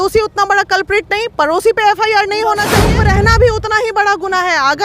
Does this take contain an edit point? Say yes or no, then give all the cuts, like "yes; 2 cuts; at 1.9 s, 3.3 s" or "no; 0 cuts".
yes; 1 cut; at 2.9 s